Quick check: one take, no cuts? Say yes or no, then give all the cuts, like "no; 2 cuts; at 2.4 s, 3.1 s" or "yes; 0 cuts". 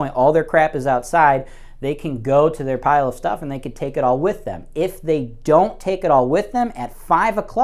yes; 0 cuts